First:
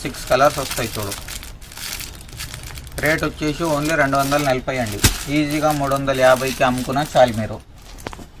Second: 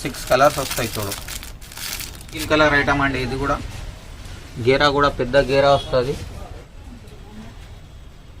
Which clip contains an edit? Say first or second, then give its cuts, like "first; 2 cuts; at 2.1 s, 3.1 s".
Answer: second; 1 cut; at 2.5 s